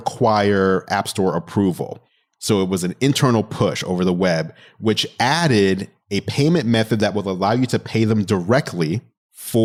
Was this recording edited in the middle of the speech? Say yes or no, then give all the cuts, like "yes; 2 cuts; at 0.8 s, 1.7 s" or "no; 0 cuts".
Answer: no; 0 cuts